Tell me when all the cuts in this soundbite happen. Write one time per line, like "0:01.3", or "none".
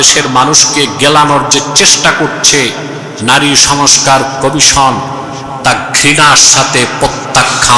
none